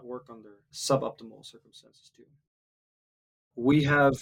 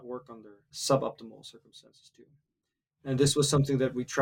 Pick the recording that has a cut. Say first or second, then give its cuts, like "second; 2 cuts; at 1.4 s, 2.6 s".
first; 1 cut; at 3.1 s